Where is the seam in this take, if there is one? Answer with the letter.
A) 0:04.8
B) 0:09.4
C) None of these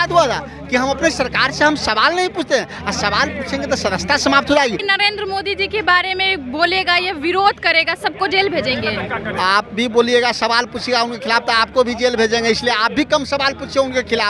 A